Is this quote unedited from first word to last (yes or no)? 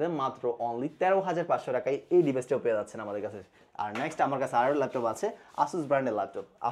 yes